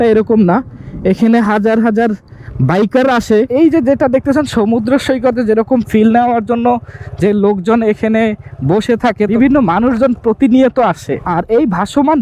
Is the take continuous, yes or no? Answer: no